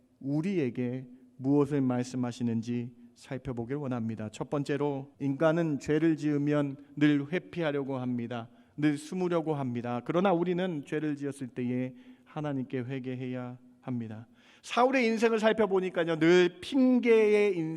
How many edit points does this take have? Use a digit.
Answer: 1